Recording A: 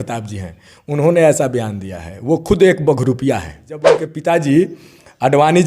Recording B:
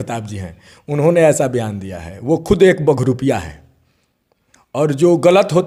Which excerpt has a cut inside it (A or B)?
A